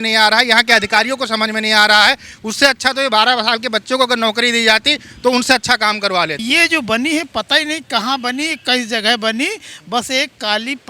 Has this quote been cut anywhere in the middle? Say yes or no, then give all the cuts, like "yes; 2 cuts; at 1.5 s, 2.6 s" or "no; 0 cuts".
yes; 1 cut; at 6.4 s